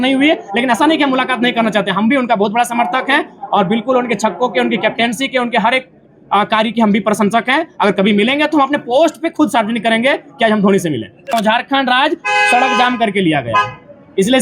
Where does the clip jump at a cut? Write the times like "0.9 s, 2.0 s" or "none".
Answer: 11.3 s

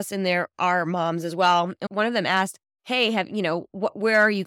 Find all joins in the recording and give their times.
1.8 s

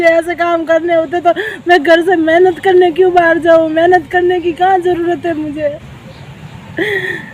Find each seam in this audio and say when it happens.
none

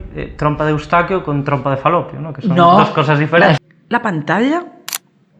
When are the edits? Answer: 3.6 s

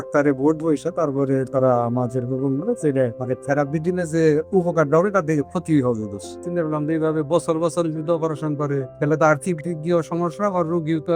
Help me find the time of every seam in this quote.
3.2 s, 6.4 s, 8.9 s

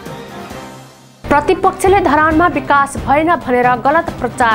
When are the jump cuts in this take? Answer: none

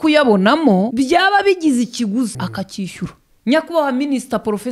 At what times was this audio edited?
0.9 s, 2.4 s

